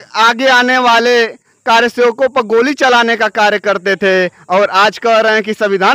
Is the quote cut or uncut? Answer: uncut